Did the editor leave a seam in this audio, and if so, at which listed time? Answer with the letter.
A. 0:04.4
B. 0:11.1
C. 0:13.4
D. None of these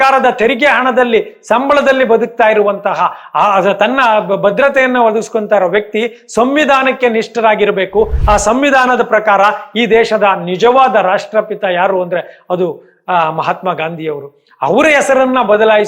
D